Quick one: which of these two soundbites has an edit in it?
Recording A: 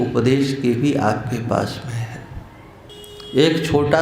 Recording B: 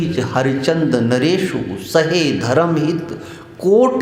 A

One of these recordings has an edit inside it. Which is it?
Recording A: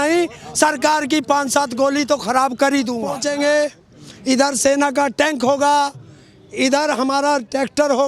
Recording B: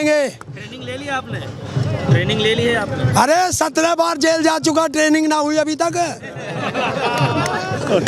A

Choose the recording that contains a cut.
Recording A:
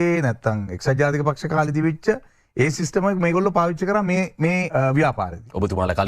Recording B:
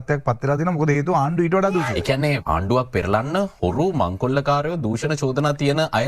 B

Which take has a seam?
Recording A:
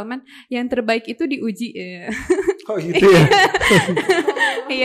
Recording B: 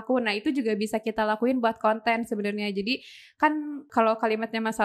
B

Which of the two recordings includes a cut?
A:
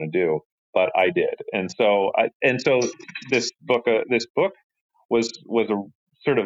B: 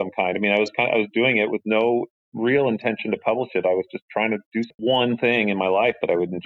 B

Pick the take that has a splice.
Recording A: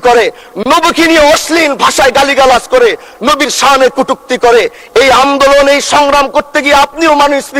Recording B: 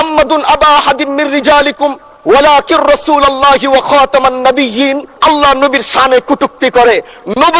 B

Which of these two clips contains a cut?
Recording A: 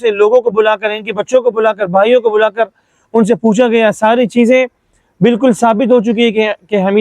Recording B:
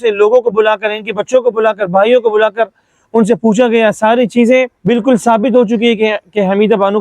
B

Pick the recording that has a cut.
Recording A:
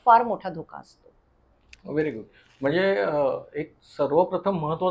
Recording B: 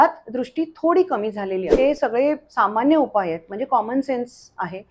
B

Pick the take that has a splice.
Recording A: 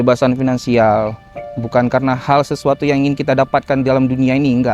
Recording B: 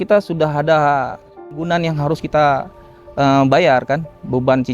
B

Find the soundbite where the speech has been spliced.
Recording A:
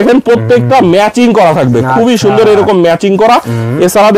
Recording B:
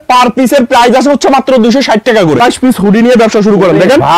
B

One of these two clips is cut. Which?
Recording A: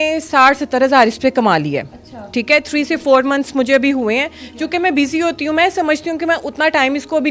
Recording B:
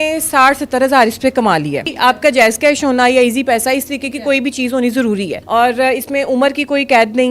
B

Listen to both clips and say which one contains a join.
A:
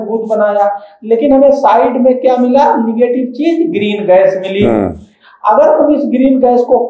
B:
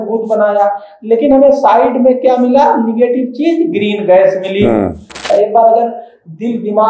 B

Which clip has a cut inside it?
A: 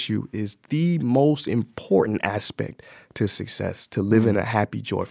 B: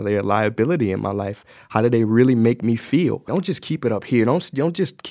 B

